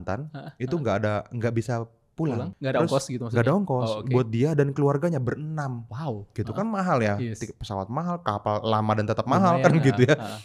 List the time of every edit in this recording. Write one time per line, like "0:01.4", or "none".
0:02.5